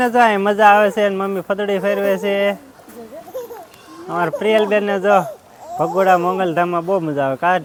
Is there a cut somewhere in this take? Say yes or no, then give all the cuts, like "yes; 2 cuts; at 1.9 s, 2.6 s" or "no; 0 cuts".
no; 0 cuts